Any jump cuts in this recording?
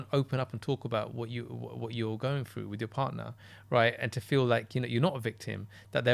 no; 0 cuts

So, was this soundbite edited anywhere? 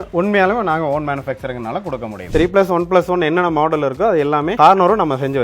yes; 2 cuts; at 2.2 s, 4.5 s

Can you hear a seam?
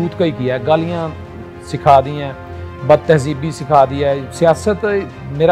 no; 0 cuts

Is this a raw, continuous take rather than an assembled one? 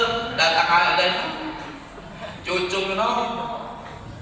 yes; 0 cuts

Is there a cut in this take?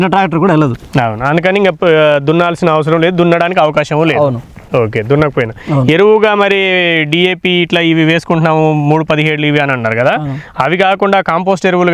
no; 0 cuts

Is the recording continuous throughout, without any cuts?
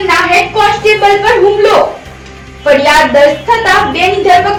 yes; 0 cuts

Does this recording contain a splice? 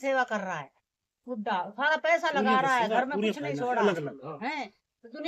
no; 0 cuts

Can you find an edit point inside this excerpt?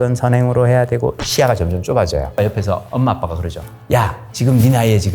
yes; 2 cuts; at 2.5 s, 3.9 s

